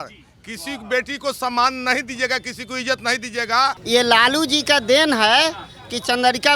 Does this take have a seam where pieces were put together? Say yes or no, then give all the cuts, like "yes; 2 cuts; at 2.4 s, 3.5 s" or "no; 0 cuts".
yes; 1 cut; at 3.8 s